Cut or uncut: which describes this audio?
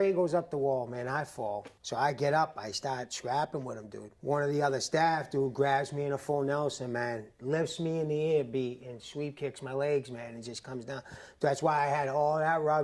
uncut